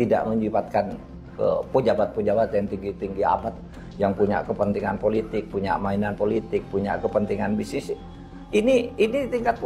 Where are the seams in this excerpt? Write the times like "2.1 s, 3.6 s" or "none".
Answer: none